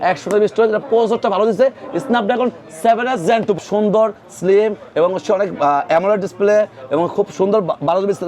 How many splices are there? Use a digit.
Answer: 1